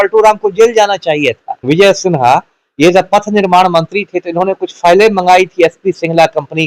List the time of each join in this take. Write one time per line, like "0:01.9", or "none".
0:01.5